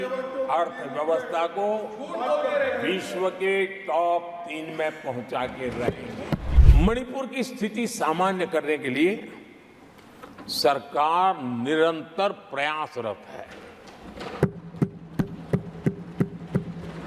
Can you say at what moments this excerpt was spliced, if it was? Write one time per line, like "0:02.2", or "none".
0:06.5